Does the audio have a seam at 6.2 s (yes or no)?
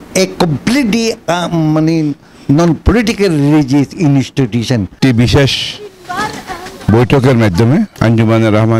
no